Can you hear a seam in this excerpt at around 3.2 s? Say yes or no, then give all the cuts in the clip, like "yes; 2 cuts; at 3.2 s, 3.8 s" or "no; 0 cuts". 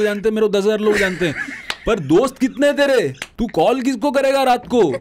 yes; 1 cut; at 3.2 s